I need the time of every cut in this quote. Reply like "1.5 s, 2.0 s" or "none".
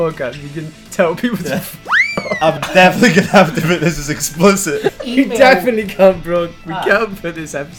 2.6 s, 5.0 s